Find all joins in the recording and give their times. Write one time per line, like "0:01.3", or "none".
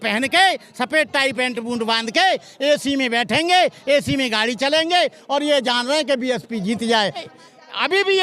0:07.2